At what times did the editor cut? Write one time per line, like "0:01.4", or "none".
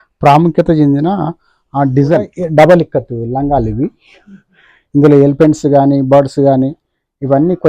0:02.4